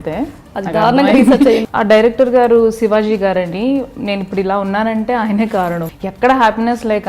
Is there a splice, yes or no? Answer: yes